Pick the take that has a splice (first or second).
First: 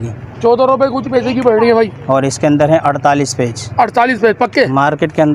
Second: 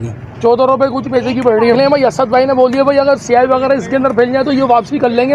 second